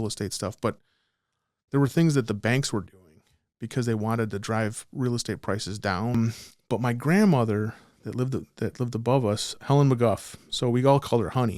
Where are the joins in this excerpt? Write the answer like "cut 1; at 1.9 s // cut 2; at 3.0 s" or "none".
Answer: cut 1; at 6.1 s